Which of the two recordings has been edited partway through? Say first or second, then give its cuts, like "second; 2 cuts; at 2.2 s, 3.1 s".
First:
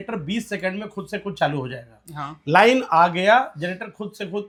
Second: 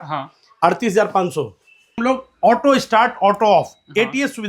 second; 1 cut; at 2.0 s